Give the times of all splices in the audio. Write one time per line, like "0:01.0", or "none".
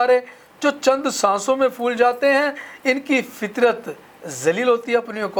none